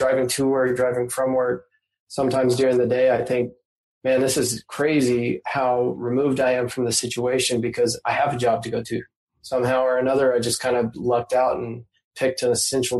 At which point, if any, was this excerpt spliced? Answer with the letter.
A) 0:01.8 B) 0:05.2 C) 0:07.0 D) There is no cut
D